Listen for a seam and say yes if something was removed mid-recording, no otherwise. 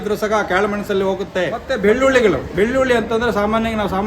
yes